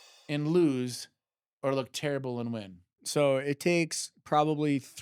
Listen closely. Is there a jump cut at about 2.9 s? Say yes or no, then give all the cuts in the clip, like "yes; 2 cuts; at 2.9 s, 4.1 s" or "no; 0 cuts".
yes; 1 cut; at 2.9 s